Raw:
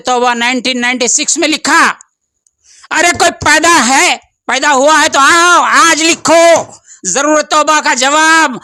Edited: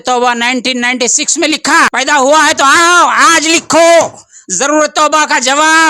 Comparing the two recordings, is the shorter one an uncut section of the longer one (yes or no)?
no